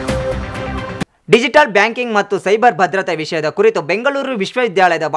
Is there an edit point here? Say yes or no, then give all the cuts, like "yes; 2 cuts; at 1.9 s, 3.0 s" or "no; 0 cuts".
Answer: no; 0 cuts